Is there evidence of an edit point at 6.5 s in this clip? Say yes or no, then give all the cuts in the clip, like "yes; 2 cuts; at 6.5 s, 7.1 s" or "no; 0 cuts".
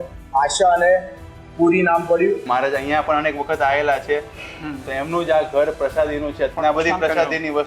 yes; 2 cuts; at 2.4 s, 6.5 s